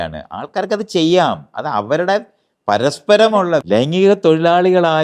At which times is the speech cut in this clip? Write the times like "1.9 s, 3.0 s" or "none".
3.6 s